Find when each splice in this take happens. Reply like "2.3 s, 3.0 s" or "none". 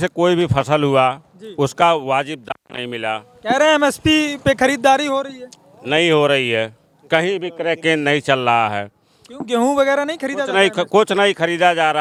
none